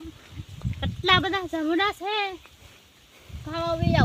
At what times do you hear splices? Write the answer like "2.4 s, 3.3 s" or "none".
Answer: none